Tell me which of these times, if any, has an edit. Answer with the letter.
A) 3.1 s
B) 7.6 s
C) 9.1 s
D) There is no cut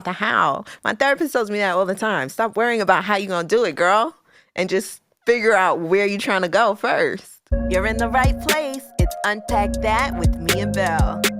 B